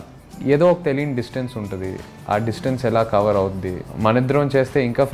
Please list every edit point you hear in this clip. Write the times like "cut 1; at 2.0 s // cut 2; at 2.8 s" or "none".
cut 1; at 3.9 s